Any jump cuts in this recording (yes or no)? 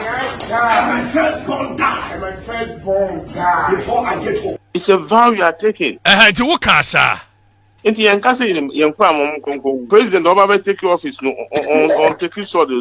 yes